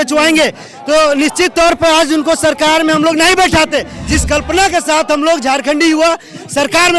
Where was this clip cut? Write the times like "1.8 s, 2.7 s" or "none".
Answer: 4.0 s